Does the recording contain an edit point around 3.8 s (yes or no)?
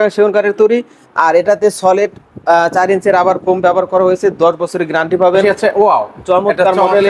no